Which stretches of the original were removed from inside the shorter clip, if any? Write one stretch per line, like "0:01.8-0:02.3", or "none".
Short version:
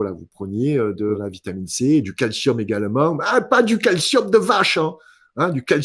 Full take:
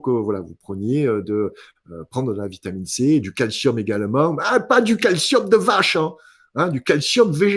0:01.5-0:02.4